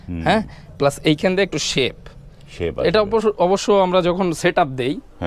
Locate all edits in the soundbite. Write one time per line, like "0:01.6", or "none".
none